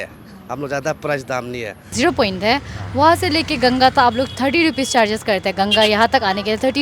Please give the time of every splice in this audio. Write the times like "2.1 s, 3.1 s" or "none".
1.9 s

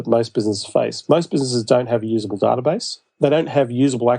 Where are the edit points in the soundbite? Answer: 3.0 s

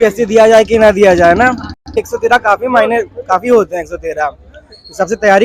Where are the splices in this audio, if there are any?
2.0 s

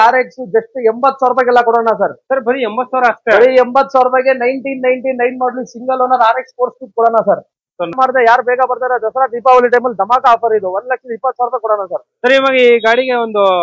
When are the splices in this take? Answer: 8.0 s

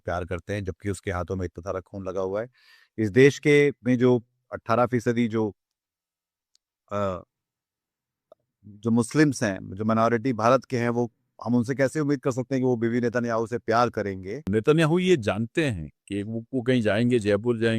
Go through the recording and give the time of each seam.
14.5 s

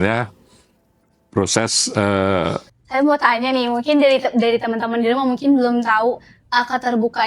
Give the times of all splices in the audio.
2.7 s

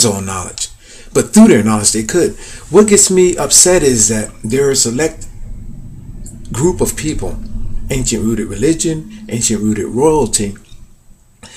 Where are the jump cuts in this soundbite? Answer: none

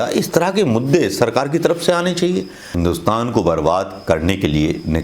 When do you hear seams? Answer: 2.8 s

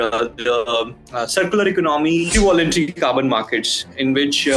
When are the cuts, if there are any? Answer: 2.3 s

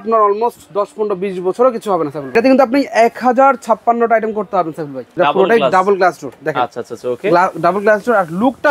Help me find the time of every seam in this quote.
2.3 s, 5.1 s

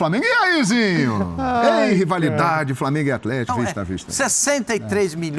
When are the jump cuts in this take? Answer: 3.5 s

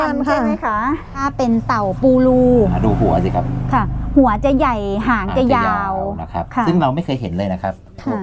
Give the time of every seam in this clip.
1.1 s

